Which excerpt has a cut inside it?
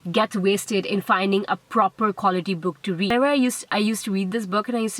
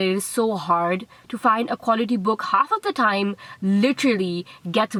first; 1 cut; at 3.1 s

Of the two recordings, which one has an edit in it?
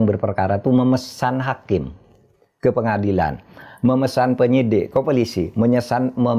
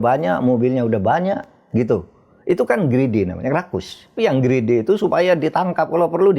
second; 1 cut; at 4.2 s

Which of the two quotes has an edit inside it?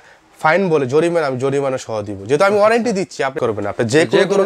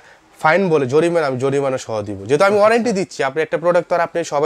first; 1 cut; at 3.3 s

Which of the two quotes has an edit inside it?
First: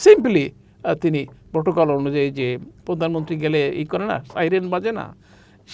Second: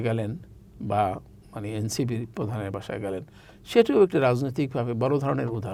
first; 2 cuts; at 1.4 s, 2.7 s

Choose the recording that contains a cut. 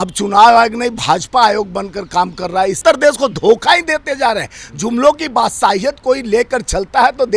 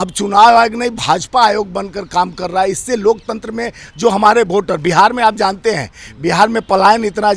first; 1 cut; at 2.8 s

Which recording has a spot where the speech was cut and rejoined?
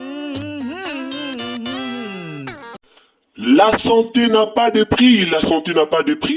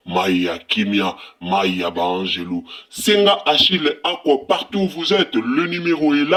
first; 1 cut; at 2.7 s

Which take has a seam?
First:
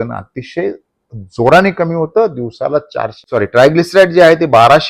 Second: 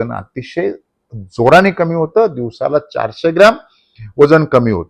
first; 1 cut; at 3.3 s

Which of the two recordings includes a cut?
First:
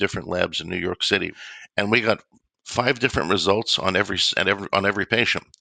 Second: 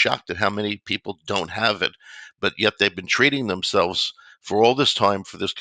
first; 1 cut; at 1.4 s

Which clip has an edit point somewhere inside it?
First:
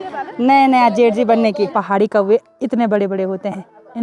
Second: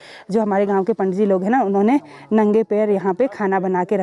first; 1 cut; at 1.7 s

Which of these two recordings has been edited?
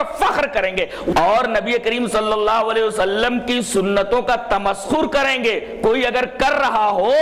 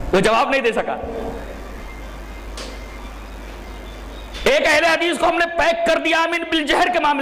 first; 1 cut; at 1.1 s

